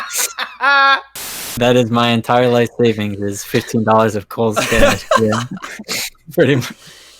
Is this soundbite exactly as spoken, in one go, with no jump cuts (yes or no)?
no